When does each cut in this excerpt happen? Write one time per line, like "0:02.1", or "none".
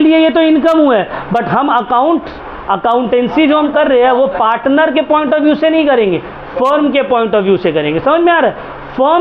none